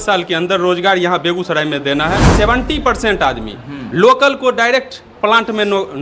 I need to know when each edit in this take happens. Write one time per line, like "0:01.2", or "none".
0:02.3